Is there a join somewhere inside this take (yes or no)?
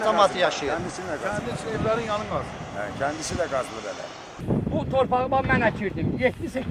yes